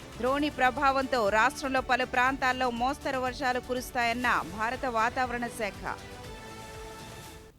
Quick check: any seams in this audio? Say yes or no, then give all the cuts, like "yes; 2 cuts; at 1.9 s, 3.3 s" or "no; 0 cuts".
no; 0 cuts